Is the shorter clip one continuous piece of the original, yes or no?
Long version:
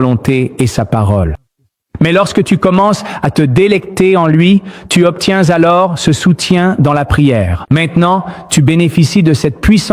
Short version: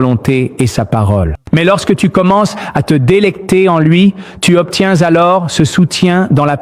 no